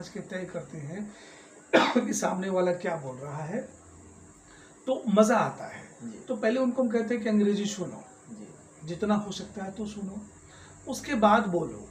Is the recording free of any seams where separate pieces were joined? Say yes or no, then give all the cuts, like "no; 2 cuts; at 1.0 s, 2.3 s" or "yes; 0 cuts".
yes; 0 cuts